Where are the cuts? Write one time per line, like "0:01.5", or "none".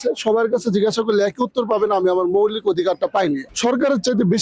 0:03.5